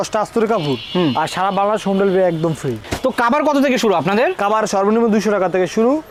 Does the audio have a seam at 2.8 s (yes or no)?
no